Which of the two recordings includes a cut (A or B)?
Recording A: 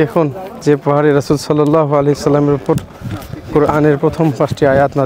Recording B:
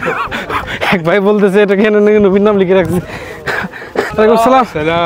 B